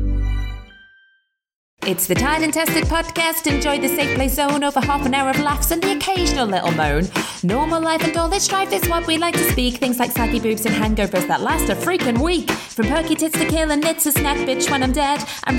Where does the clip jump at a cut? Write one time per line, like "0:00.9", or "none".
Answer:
0:01.7